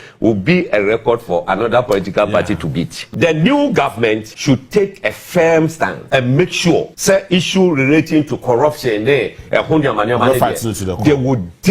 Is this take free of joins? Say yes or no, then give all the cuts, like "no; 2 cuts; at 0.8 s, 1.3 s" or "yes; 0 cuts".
no; 4 cuts; at 3.0 s, 4.3 s, 6.0 s, 6.9 s